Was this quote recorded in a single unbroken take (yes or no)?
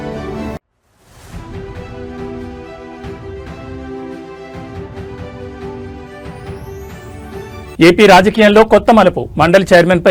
yes